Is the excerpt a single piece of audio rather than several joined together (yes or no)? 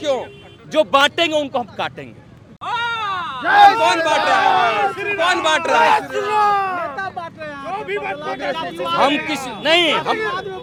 yes